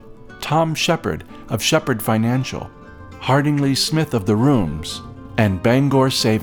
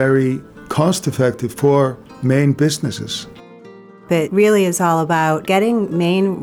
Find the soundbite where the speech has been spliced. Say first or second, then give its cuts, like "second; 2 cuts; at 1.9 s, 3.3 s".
second; 3 cuts; at 2.1 s, 3.9 s, 5.4 s